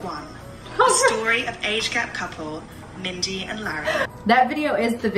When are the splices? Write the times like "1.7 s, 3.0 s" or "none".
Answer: 4.1 s